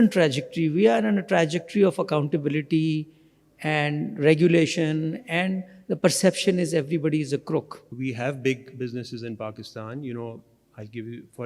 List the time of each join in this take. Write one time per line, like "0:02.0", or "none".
0:07.8